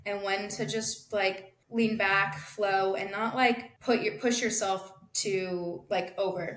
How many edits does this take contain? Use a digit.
2